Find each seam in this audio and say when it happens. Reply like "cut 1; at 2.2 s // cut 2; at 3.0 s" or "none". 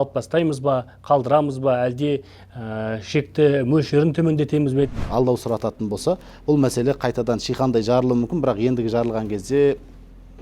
cut 1; at 5.0 s